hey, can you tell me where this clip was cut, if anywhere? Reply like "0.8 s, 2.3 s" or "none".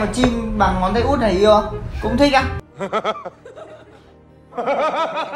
none